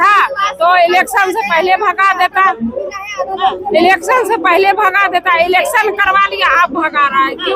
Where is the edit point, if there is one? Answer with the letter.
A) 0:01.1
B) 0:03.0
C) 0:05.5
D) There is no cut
D